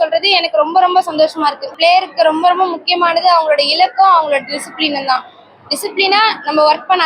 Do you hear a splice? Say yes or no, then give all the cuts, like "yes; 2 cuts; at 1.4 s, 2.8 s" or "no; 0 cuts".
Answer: yes; 1 cut; at 1.7 s